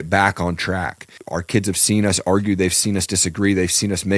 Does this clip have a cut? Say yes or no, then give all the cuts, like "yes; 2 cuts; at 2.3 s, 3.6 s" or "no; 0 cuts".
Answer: yes; 1 cut; at 1.1 s